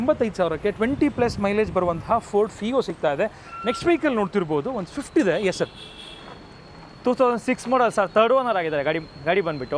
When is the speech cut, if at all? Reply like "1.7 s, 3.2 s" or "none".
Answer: none